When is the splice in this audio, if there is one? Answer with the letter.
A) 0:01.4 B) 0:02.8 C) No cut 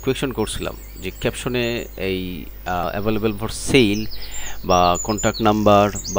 B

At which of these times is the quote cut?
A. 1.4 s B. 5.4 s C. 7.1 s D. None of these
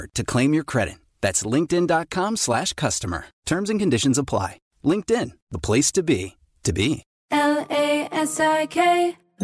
C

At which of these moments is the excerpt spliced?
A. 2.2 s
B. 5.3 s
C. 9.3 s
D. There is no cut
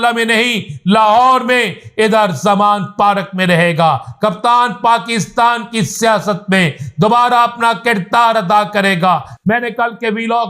D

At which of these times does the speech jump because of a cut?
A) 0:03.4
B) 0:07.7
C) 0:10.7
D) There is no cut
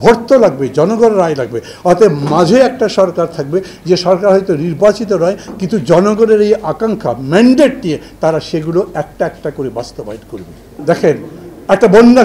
C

